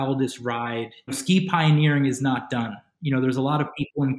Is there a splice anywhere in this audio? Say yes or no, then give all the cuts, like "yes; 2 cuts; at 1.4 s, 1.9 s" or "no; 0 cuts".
yes; 1 cut; at 1.1 s